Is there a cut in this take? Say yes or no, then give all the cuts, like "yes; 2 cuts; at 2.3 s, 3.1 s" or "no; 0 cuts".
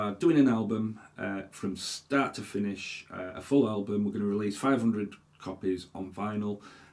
no; 0 cuts